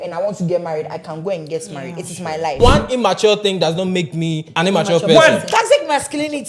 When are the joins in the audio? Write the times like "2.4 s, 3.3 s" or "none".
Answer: 2.6 s, 4.4 s, 5.5 s